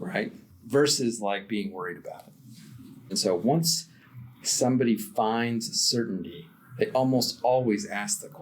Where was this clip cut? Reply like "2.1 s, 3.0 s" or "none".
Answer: 3.1 s